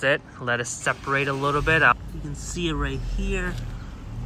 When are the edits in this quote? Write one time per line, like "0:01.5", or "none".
0:01.9